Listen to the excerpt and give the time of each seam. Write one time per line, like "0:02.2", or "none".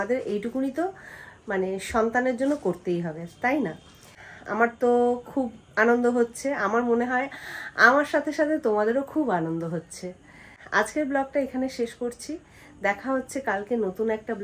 none